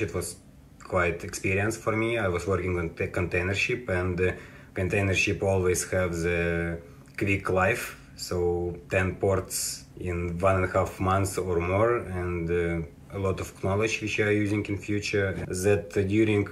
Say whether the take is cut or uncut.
cut